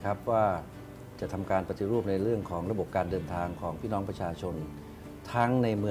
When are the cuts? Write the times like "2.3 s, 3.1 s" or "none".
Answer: none

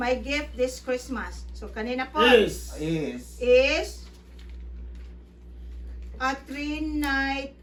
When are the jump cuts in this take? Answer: none

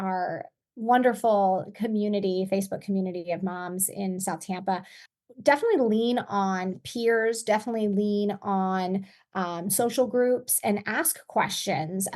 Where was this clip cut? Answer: 5.0 s

